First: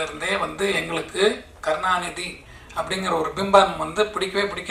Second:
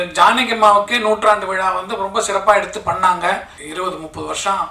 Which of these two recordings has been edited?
second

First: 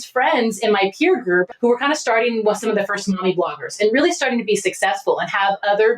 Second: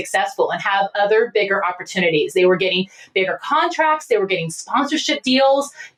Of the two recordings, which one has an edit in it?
first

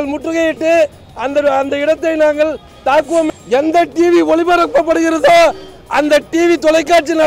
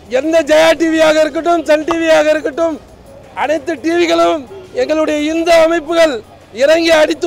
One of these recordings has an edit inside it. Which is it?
first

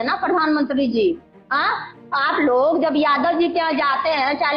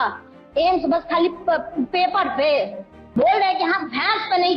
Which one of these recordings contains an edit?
second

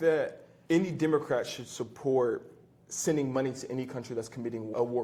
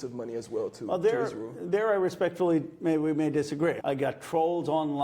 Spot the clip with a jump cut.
second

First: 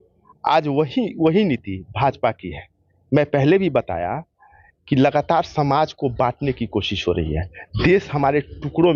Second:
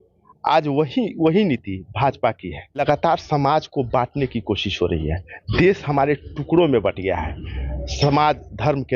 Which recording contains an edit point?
second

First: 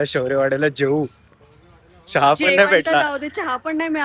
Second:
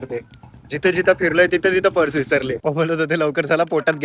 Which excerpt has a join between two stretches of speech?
second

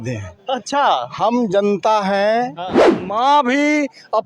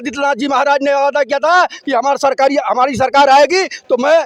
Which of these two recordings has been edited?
first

